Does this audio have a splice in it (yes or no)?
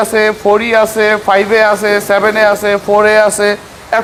no